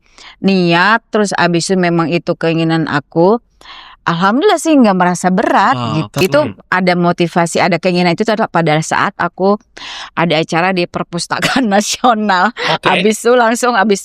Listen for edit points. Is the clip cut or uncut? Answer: cut